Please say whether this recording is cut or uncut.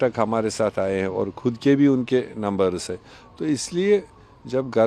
uncut